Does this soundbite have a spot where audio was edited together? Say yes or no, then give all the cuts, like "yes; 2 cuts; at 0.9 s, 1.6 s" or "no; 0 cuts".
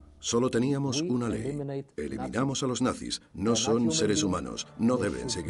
no; 0 cuts